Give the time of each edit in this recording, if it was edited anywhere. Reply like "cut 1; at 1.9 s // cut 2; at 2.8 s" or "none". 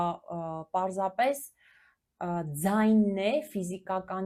none

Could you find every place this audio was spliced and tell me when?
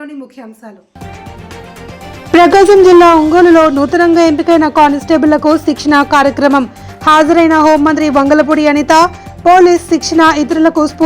cut 1; at 0.9 s

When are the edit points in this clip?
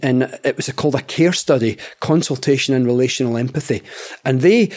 none

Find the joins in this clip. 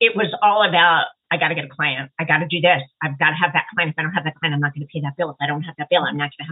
none

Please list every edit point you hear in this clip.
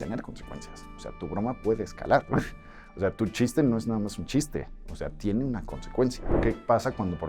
cut 1; at 6.3 s

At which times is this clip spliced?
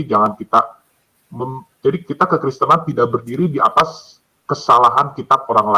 none

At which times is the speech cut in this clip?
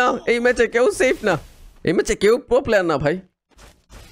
none

